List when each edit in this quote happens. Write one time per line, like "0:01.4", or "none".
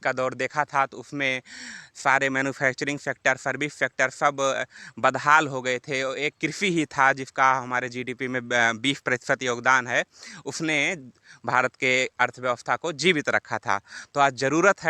none